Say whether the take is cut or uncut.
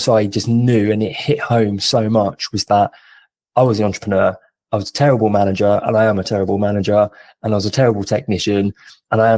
uncut